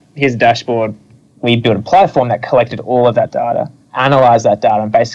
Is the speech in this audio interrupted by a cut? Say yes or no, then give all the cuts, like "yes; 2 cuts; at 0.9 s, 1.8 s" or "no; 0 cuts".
yes; 1 cut; at 1.1 s